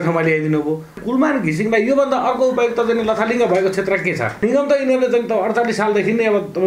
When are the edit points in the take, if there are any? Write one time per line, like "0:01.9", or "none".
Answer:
0:01.0
0:04.4